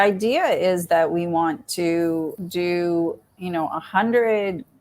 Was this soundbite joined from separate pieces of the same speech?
yes; 1 cut; at 2.4 s

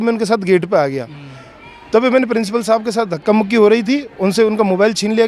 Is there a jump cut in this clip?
no; 0 cuts

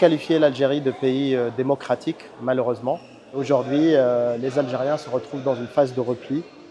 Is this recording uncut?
no; 1 cut; at 3.4 s

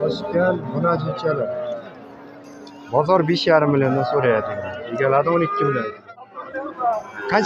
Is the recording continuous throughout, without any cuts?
no; 1 cut; at 6.2 s

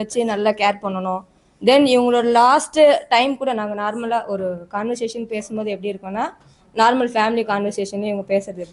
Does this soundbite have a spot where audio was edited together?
no; 0 cuts

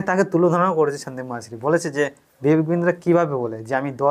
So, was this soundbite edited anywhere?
no; 0 cuts

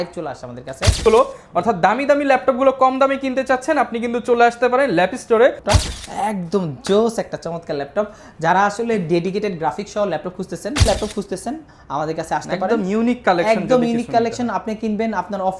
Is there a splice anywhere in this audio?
yes; 3 cuts; at 1.0 s, 5.6 s, 10.9 s

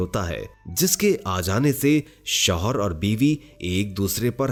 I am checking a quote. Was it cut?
no; 0 cuts

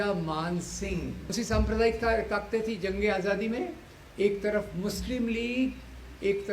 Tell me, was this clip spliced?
yes; 1 cut; at 1.3 s

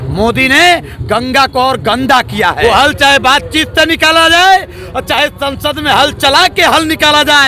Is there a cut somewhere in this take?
yes; 1 cut; at 2.6 s

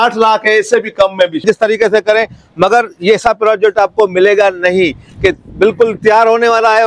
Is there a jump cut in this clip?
yes; 1 cut; at 1.4 s

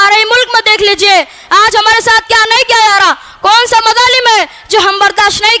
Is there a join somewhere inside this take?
no; 0 cuts

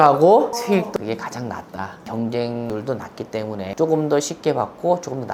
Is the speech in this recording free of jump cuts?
no; 1 cut; at 2.0 s

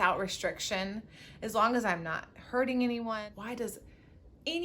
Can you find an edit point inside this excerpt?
yes; 1 cut; at 3.2 s

